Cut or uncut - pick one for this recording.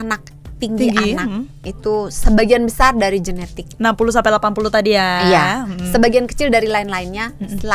uncut